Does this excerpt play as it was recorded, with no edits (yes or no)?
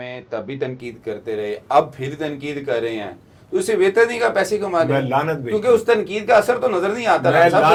yes